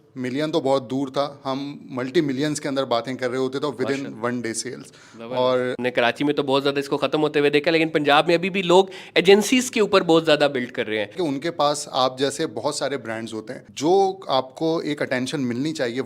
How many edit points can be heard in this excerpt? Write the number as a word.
three